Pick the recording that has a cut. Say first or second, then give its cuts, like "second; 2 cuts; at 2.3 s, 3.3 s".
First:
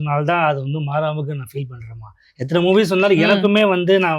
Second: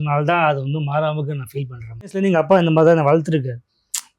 second; 1 cut; at 2.1 s